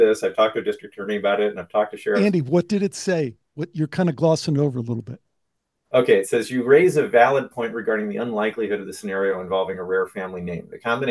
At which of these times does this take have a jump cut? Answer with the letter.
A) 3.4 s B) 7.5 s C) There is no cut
C